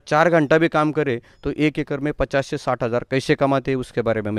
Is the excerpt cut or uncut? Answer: uncut